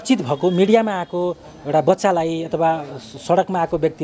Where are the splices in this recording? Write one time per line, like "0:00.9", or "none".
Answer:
none